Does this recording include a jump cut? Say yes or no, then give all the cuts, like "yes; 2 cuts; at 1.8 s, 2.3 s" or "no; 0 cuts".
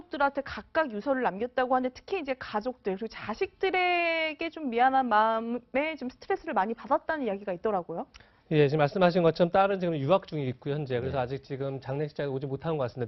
no; 0 cuts